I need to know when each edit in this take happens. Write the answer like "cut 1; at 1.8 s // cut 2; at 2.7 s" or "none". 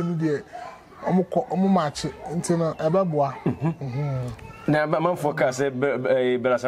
none